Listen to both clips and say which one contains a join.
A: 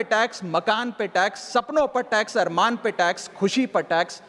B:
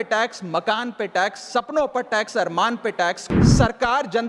B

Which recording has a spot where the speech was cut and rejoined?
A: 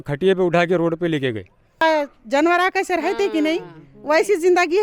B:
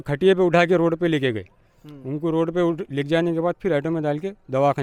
A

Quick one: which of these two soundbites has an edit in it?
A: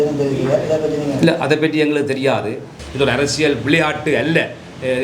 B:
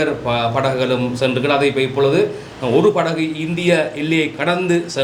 A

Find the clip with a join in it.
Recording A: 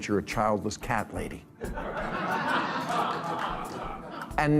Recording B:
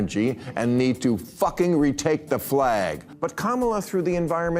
B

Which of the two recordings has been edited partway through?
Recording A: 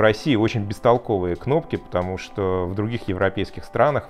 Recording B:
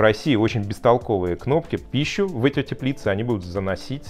B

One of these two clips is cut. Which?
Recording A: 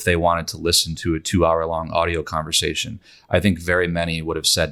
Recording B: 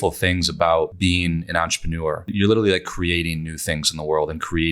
B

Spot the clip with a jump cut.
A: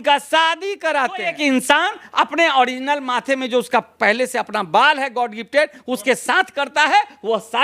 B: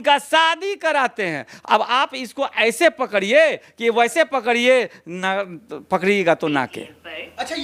A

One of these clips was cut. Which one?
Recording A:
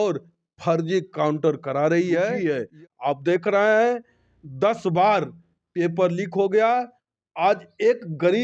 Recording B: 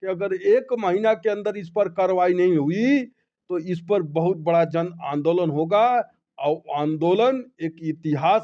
A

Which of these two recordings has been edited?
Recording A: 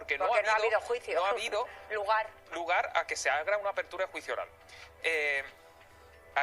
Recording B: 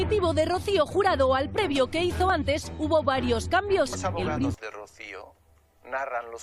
B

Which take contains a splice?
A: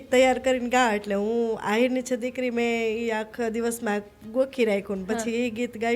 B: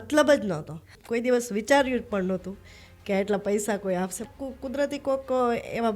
B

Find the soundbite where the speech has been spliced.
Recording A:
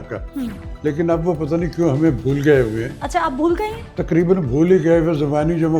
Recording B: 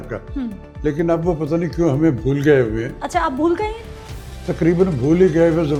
A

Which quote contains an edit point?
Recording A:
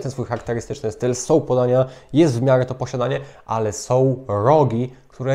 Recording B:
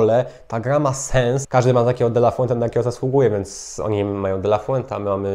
B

